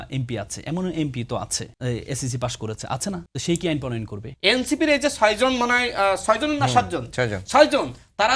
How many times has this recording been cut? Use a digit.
3